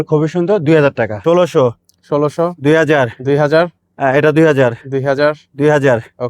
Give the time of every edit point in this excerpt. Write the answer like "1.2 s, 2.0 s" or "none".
1.1 s